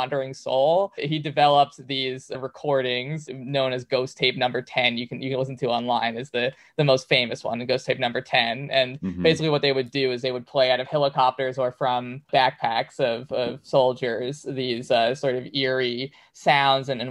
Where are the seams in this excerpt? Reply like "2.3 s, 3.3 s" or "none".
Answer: none